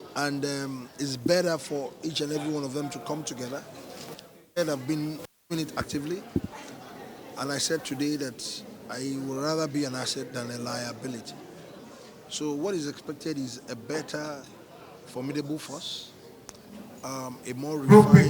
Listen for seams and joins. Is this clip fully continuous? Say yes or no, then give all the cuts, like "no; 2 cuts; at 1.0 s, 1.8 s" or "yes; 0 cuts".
yes; 0 cuts